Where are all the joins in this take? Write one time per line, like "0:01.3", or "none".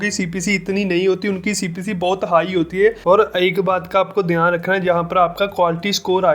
0:03.0